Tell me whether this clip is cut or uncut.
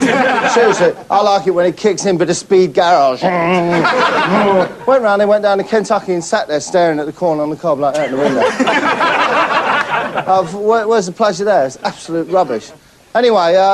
cut